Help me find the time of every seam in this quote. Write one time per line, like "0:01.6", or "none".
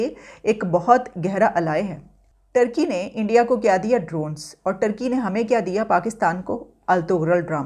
none